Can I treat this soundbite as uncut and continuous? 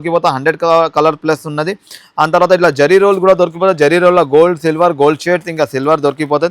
yes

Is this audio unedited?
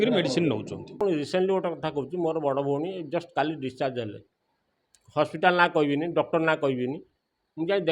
no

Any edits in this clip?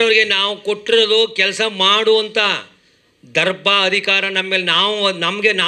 no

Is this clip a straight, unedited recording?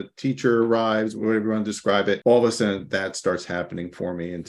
no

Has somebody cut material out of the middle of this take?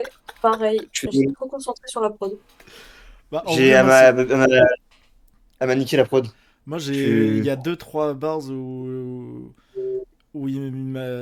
no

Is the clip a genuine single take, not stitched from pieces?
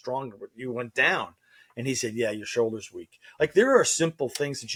yes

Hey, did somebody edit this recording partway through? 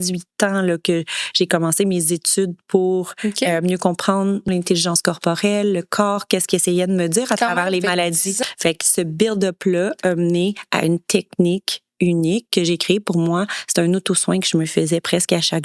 yes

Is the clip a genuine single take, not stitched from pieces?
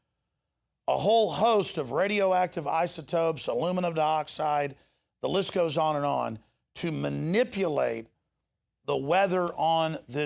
no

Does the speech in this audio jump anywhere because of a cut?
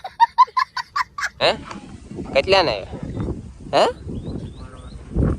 yes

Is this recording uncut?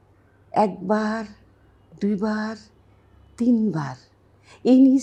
yes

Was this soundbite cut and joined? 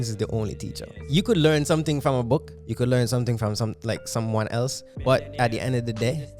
yes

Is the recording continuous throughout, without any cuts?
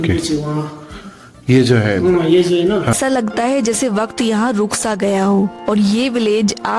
no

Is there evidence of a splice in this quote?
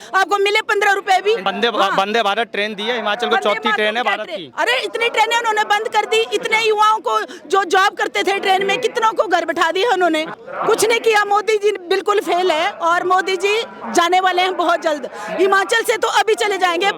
yes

